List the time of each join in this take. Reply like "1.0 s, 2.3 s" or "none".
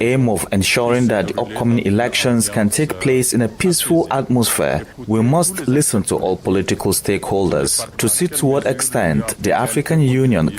4.9 s, 7.9 s